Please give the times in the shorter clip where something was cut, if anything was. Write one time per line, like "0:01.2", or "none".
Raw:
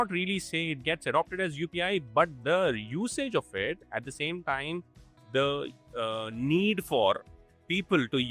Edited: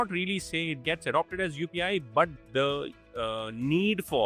0:02.4